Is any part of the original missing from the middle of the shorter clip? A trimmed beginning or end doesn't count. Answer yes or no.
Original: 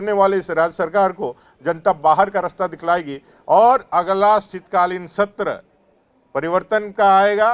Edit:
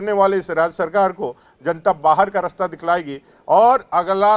no